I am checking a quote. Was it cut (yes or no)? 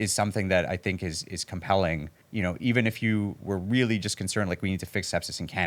yes